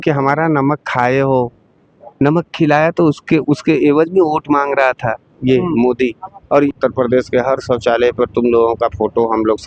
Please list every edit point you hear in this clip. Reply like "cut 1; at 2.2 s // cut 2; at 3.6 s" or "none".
cut 1; at 6.7 s